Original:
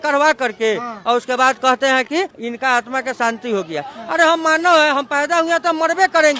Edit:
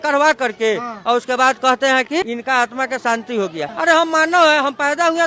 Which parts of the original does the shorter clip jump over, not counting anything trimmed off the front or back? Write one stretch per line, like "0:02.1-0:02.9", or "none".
0:02.3-0:02.4
0:03.9-0:04.0